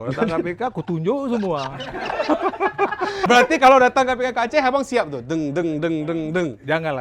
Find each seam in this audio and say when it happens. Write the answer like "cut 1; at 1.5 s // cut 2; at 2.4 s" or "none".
cut 1; at 3.1 s